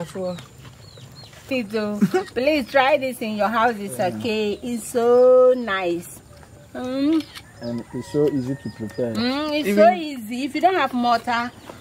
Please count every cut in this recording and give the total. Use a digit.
1